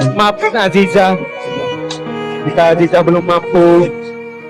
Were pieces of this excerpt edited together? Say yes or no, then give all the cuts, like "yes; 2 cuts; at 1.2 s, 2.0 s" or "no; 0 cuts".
yes; 2 cuts; at 1.2 s, 2.4 s